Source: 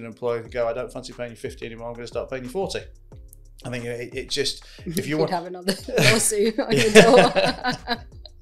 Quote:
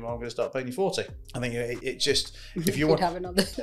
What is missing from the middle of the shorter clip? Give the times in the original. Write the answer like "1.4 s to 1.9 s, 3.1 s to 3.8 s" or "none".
3.0 s to 3.5 s